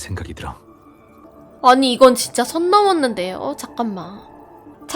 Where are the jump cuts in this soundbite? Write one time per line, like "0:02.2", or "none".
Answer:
0:01.2